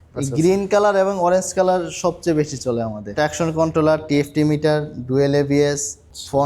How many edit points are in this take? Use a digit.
1